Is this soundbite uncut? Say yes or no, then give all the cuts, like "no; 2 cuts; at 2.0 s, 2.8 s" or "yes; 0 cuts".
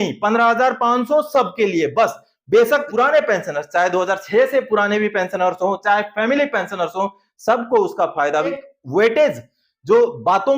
no; 2 cuts; at 2.9 s, 8.6 s